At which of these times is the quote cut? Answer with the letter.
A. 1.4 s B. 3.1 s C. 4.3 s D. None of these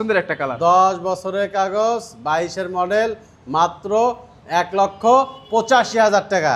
D